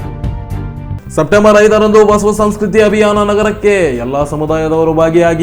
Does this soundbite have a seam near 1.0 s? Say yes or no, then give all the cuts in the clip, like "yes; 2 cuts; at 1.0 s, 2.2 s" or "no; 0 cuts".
yes; 1 cut; at 1.0 s